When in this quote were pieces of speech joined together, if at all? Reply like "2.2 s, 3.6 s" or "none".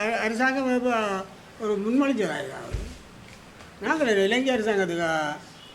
none